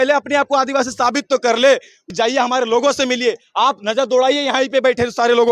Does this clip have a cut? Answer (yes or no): yes